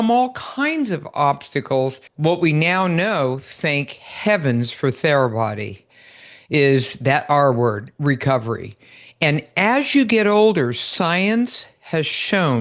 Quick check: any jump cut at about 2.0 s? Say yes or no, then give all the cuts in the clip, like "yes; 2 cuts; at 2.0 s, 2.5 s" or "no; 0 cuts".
yes; 1 cut; at 2.0 s